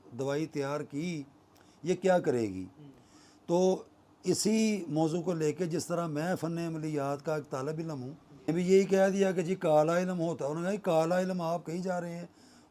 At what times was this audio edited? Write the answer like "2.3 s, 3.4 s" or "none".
8.5 s